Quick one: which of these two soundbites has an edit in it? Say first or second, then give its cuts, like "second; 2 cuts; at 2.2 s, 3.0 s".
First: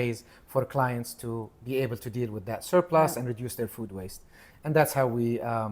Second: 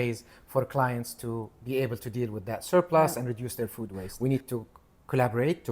second; 1 cut; at 4.0 s